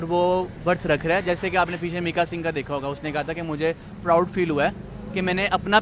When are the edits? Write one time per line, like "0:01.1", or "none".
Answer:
none